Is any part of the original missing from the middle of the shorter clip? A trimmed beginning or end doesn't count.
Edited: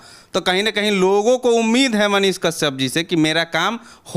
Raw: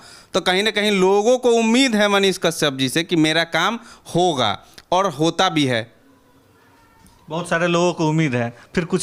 no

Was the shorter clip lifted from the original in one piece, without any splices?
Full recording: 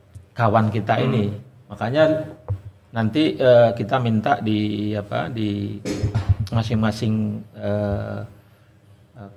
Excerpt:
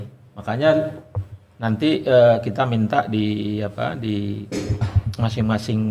yes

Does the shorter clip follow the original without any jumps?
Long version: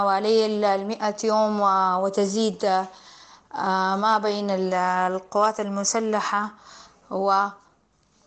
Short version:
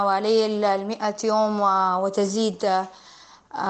yes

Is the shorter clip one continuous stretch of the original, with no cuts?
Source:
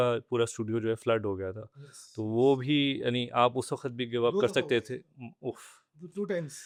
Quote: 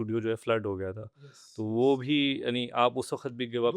yes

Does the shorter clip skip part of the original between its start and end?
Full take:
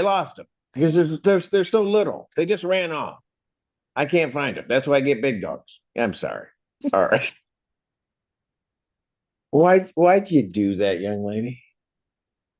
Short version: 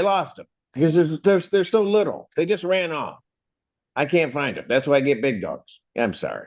no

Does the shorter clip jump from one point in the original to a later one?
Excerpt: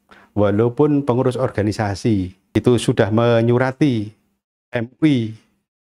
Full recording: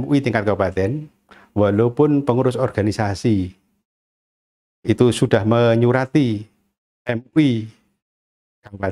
yes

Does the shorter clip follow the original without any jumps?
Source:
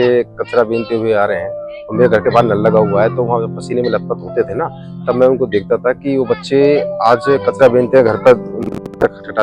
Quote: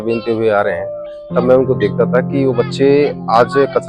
no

